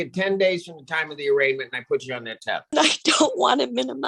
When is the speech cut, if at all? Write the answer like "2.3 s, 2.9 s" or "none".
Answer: 2.7 s

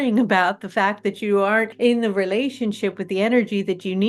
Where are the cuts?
1.7 s

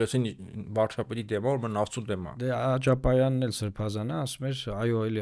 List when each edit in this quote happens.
2.3 s

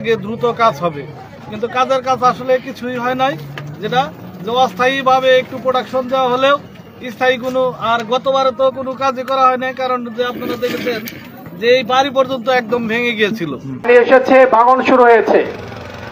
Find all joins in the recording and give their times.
13.9 s

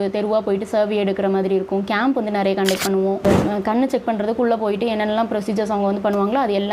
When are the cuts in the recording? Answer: 3.2 s

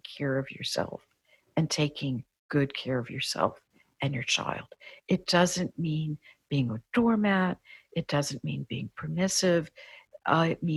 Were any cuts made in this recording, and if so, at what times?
none

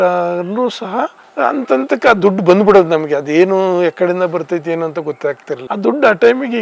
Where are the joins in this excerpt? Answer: 1.2 s

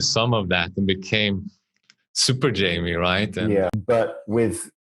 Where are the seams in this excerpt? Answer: 3.8 s

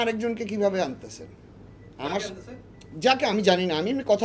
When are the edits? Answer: none

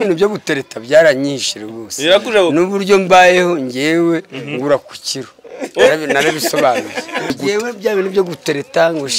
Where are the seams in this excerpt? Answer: 7.3 s

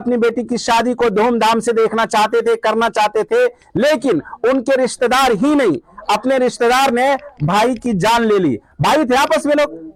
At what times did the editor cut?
none

